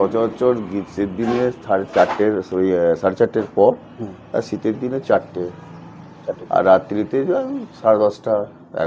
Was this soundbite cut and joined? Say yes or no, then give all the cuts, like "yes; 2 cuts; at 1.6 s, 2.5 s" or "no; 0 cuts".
no; 0 cuts